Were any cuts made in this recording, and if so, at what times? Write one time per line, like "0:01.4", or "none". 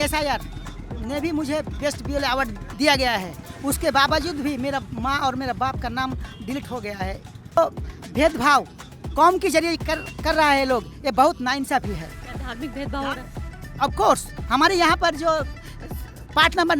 0:07.6